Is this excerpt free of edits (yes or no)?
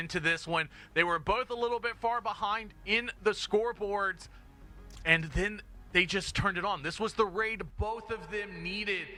yes